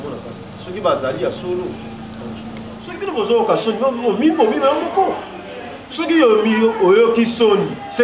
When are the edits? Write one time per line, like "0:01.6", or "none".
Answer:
0:03.1